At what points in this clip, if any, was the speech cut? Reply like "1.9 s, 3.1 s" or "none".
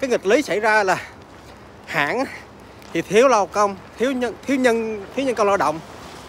none